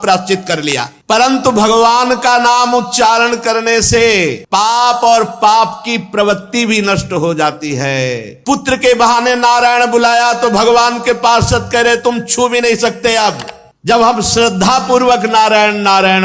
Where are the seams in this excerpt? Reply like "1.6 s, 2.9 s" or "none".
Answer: 1.0 s, 8.3 s